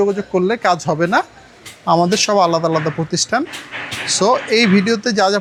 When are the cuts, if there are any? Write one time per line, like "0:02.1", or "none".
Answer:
none